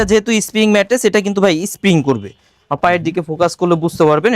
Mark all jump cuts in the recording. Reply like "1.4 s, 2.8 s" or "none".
none